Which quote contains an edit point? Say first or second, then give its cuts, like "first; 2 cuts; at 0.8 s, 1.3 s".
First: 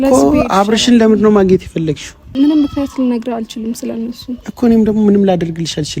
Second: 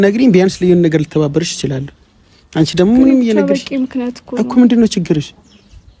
first; 1 cut; at 2.2 s